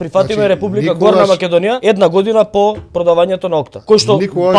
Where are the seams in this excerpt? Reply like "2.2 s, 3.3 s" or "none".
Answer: 1.8 s, 3.7 s